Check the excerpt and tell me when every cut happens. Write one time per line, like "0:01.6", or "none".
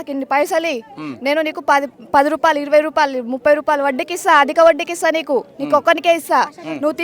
none